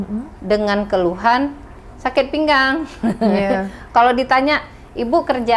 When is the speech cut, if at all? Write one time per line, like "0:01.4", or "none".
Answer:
none